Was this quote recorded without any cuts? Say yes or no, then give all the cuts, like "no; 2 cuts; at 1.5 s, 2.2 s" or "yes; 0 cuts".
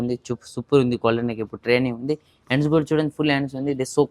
yes; 0 cuts